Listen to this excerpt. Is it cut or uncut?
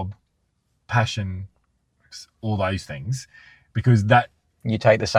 uncut